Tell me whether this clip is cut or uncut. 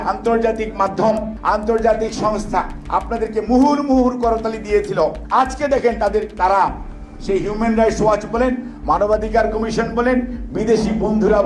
cut